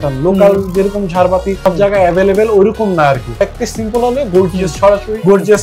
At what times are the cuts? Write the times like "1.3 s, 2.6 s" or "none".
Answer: 1.7 s, 3.4 s

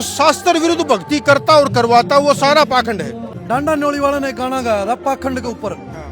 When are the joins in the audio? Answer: 3.3 s

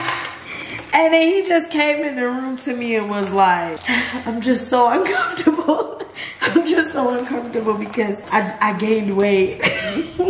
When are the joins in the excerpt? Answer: 3.8 s, 8.2 s

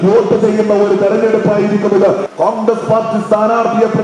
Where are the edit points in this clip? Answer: 2.2 s

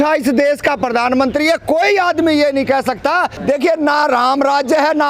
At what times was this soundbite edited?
3.3 s

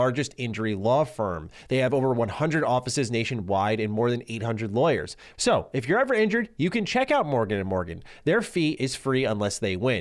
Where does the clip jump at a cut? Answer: 5.2 s

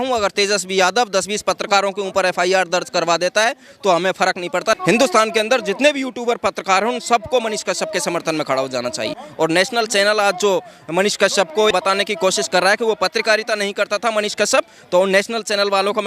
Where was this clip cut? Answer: 4.8 s, 9.2 s, 11.7 s

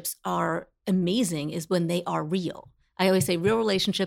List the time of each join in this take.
none

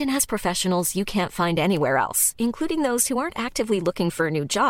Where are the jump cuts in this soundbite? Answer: none

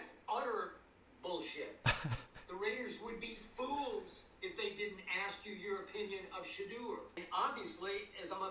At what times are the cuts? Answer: 7.2 s

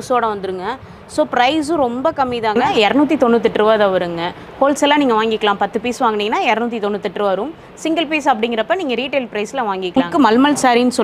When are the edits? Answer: 2.7 s, 10.0 s

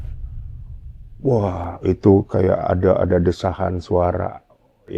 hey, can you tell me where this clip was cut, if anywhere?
1.0 s

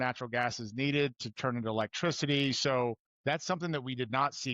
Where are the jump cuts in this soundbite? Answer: 3.1 s

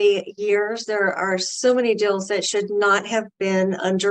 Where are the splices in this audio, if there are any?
none

